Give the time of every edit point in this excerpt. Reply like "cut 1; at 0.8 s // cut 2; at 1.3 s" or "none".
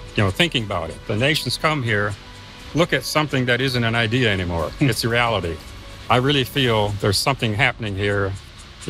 cut 1; at 1.0 s // cut 2; at 5.9 s